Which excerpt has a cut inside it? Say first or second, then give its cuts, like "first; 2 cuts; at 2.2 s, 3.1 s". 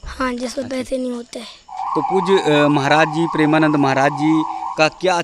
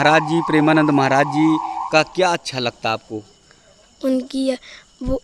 first; 1 cut; at 1.8 s